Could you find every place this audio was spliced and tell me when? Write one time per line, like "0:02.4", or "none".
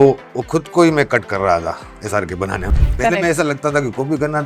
0:02.8